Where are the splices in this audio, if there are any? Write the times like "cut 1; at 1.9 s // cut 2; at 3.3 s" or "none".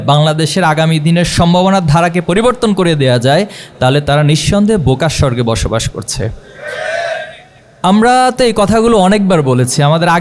none